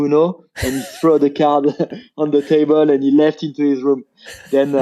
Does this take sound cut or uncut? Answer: uncut